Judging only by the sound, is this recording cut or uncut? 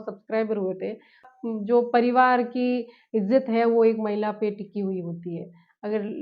cut